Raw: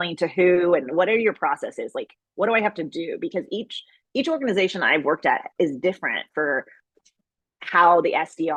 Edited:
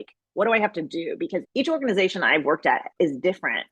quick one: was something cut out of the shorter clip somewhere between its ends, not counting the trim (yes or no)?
yes